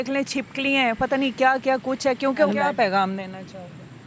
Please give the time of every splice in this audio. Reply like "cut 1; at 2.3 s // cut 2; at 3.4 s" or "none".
cut 1; at 2.5 s